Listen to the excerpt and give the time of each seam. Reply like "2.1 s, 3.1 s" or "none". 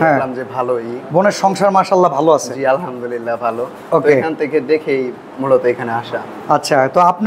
none